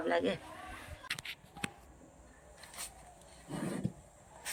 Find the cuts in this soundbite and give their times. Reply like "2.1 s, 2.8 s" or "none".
1.1 s